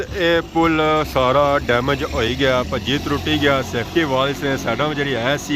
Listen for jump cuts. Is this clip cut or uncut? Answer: uncut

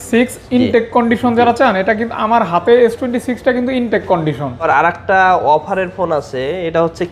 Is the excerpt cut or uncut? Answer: cut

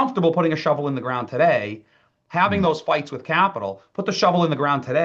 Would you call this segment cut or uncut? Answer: uncut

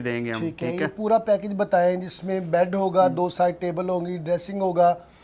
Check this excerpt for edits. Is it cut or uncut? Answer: uncut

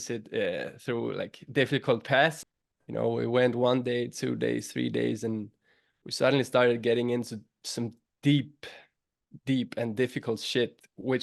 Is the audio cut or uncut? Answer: cut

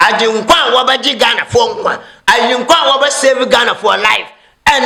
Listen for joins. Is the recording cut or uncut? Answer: uncut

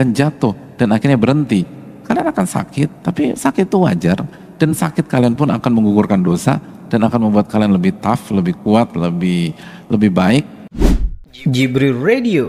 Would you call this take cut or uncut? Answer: cut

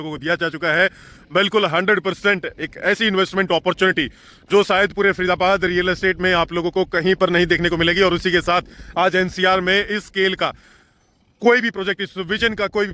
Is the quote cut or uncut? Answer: uncut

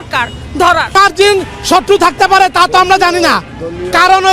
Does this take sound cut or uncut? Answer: cut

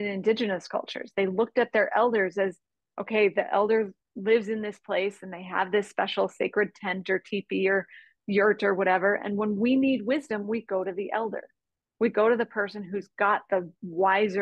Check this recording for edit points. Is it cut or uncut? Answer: uncut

